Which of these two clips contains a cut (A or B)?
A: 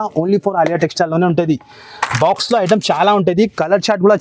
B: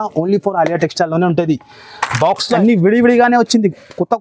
B